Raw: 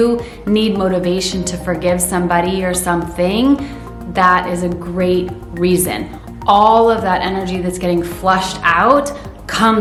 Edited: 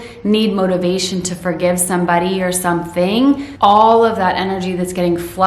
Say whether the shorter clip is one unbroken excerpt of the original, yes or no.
no